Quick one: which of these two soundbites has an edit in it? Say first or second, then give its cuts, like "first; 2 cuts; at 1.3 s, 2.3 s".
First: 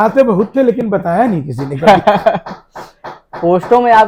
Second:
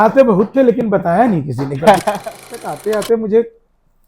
second; 1 cut; at 2.7 s